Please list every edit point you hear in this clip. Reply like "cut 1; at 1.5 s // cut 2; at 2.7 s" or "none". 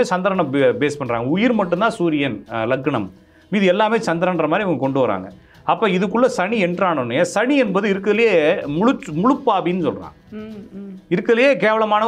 none